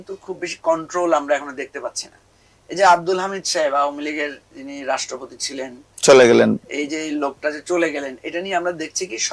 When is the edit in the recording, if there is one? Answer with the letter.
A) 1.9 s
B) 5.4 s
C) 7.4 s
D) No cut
D